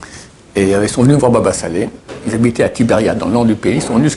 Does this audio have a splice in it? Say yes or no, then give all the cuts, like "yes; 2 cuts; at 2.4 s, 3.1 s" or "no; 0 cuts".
no; 0 cuts